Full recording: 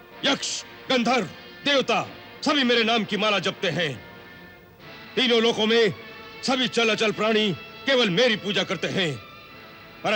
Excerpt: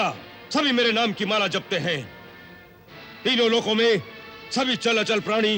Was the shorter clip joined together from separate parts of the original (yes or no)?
no